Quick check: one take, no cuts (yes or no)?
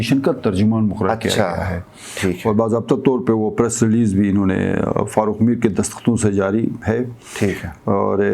yes